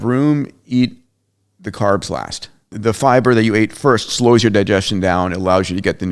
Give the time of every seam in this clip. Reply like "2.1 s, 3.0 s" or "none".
2.7 s